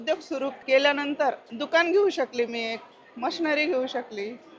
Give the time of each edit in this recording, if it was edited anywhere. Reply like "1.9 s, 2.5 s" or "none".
1.5 s